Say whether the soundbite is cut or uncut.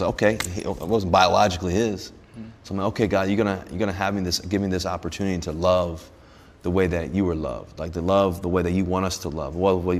uncut